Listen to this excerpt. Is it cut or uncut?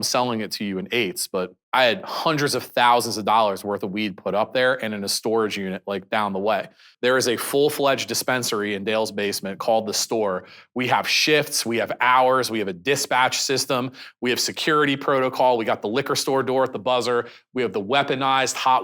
cut